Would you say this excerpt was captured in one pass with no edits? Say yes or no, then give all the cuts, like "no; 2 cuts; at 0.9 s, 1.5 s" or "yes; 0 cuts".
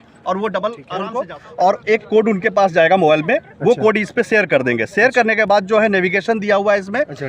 no; 1 cut; at 1.2 s